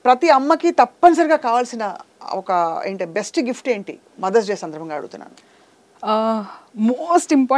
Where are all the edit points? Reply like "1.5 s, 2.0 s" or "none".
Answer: none